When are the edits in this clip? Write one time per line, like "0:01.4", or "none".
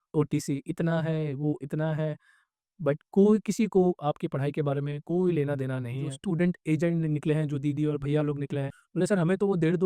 0:06.2
0:08.8